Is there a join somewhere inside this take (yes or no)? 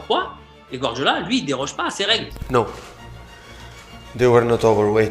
yes